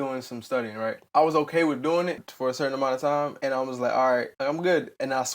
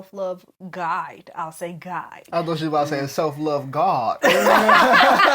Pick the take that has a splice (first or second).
first